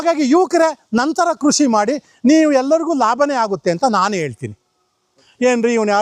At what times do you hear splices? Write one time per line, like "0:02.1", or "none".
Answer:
0:05.1